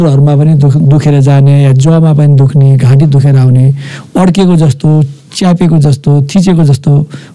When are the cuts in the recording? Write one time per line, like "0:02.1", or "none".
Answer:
none